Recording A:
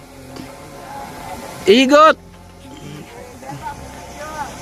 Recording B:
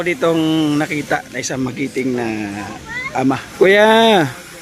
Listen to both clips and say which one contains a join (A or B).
B